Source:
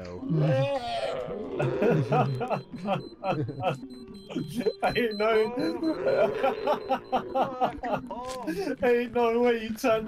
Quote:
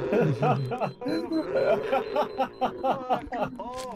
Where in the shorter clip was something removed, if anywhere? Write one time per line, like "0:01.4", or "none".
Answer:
0:01.0